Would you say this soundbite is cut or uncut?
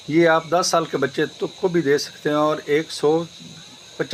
uncut